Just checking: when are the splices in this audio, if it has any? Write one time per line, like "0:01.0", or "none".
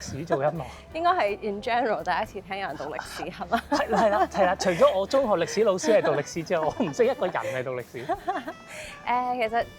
none